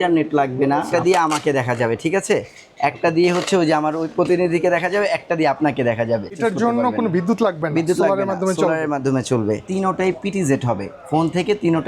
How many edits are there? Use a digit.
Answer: 3